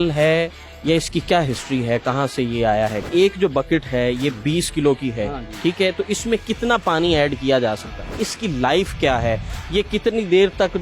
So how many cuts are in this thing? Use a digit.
2